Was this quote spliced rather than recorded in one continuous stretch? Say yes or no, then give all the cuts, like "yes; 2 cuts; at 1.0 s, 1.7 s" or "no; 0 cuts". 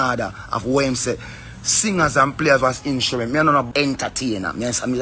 yes; 1 cut; at 3.7 s